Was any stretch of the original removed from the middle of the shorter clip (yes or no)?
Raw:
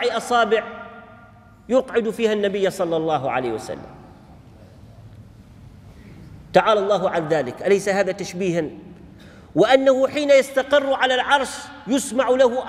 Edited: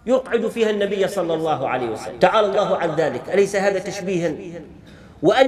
yes